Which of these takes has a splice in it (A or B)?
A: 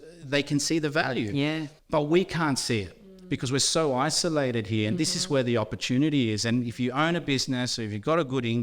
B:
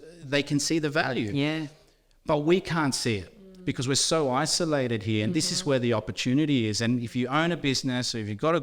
A